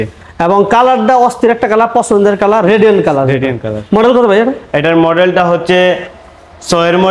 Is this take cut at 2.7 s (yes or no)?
no